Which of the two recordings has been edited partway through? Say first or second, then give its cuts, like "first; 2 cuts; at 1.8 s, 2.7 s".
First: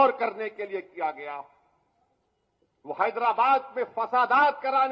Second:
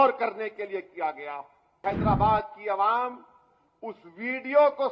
second; 1 cut; at 1.8 s